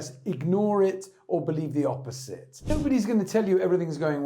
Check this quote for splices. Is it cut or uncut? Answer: cut